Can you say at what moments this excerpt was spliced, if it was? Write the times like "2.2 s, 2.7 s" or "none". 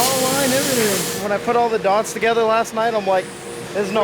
1.1 s